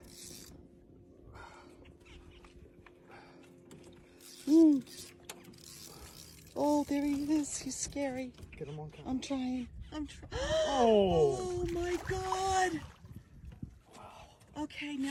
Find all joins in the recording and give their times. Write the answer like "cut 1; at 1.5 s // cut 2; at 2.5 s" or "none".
none